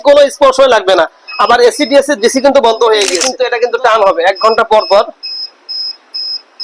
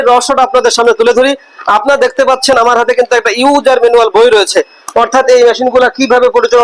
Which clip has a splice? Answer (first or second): first